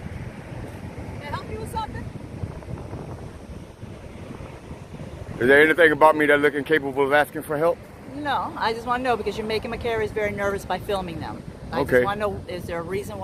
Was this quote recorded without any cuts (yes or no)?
yes